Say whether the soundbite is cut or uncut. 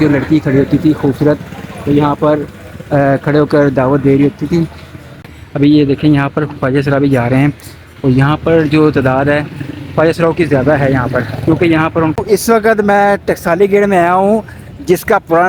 cut